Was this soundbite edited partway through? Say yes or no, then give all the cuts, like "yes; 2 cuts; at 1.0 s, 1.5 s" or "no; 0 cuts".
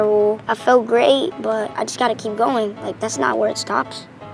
yes; 1 cut; at 1.7 s